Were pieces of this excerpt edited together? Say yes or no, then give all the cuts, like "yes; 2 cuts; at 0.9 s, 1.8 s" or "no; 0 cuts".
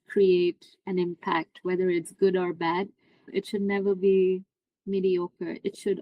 yes; 1 cut; at 3.3 s